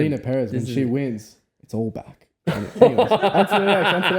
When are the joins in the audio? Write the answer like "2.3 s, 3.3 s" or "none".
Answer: none